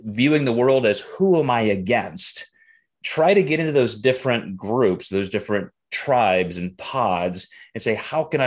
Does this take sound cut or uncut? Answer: uncut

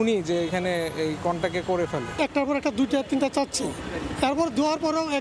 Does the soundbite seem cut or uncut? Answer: uncut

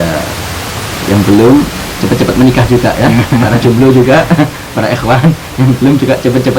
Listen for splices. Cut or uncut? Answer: uncut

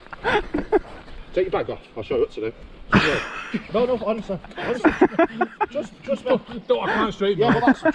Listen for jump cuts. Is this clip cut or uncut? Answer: cut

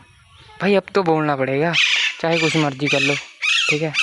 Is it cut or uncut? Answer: uncut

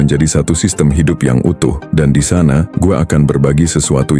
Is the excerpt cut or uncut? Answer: cut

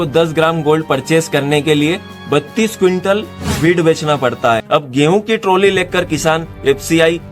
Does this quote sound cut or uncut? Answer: cut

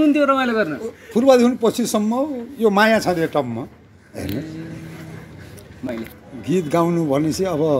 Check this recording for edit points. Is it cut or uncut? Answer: cut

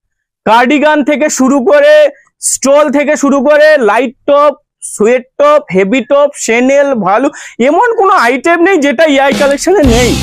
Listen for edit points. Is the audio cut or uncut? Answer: uncut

